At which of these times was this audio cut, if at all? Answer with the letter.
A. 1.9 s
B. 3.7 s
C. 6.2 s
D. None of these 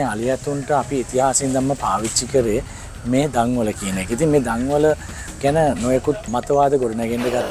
C